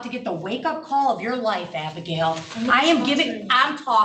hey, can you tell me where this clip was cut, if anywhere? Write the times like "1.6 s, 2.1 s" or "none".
none